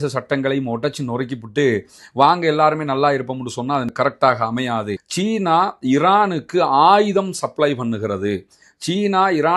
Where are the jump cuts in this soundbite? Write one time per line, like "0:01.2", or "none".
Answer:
0:05.0